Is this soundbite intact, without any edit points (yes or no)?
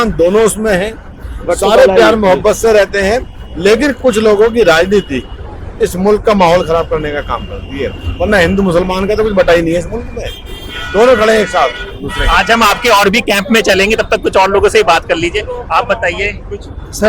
yes